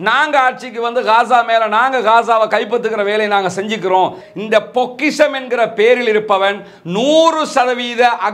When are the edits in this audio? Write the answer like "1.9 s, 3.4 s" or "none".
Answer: 4.2 s